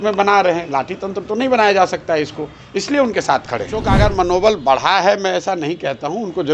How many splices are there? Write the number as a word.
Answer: one